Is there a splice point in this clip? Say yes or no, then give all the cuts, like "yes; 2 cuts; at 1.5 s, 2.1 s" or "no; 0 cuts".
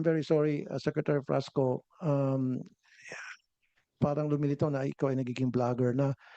no; 0 cuts